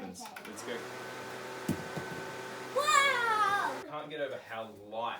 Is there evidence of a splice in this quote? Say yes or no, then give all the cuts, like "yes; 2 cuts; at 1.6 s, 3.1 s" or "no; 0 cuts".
yes; 1 cut; at 3.8 s